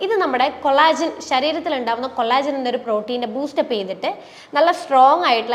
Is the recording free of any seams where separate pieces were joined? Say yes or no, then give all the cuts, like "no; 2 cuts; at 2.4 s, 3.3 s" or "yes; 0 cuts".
yes; 0 cuts